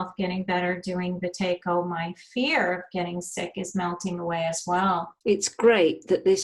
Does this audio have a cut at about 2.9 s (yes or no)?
no